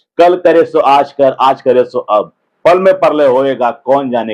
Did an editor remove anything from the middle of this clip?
no; 0 cuts

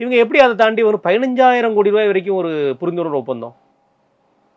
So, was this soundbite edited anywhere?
no; 0 cuts

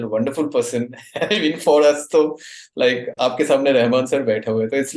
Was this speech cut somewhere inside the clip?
no; 0 cuts

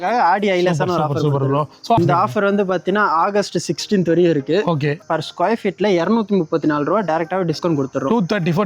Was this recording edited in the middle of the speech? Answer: yes; 2 cuts; at 2.0 s, 5.0 s

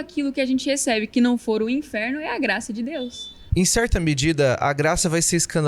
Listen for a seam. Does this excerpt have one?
yes; 1 cut; at 3.4 s

